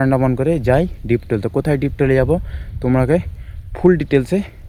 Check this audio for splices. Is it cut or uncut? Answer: uncut